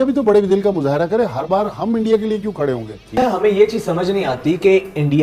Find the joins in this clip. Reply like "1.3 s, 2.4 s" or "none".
3.1 s